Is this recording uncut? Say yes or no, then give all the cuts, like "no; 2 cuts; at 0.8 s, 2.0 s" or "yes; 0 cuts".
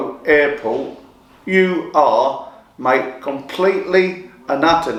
yes; 0 cuts